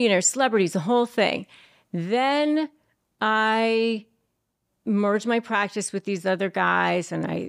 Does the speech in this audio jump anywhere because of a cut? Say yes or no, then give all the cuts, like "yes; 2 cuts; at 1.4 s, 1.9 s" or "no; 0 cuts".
no; 0 cuts